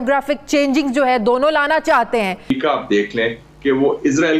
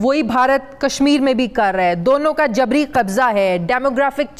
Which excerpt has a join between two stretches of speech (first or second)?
first